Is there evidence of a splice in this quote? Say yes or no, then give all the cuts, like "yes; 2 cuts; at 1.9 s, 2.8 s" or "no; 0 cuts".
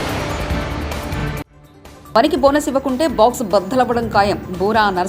yes; 1 cut; at 1.5 s